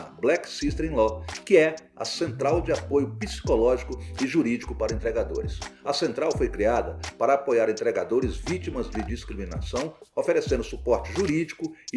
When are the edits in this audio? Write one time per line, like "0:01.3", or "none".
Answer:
none